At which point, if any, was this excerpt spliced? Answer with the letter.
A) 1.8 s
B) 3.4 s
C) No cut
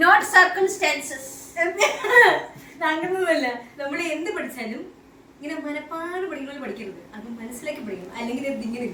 C